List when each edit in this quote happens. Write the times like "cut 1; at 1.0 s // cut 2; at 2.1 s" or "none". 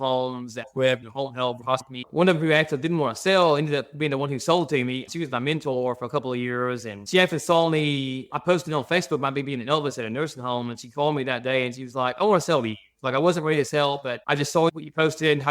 cut 1; at 2.0 s